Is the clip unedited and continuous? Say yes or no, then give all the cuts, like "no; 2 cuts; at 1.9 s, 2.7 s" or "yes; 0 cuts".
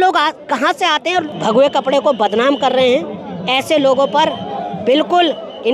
no; 1 cut; at 1.2 s